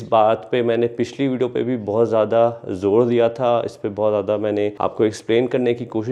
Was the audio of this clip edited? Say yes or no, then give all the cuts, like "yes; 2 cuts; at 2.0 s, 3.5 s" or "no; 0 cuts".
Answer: no; 0 cuts